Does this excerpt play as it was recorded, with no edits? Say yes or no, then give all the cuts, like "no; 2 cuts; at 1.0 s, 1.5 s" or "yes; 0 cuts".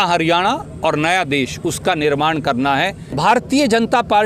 no; 1 cut; at 3.1 s